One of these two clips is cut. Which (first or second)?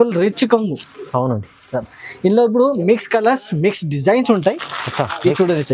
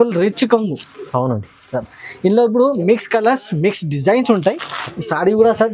second